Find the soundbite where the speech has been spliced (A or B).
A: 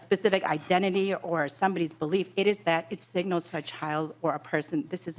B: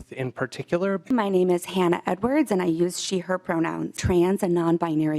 B